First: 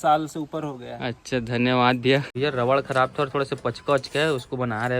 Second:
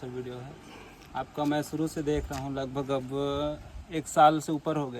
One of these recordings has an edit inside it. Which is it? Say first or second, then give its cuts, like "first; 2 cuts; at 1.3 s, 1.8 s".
first; 1 cut; at 2.3 s